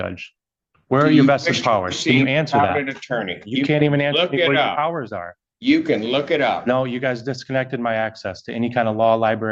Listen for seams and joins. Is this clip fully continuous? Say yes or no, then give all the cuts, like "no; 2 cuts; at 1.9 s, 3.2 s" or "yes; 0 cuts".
yes; 0 cuts